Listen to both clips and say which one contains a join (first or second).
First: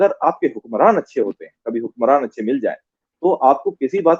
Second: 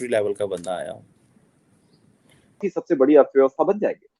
second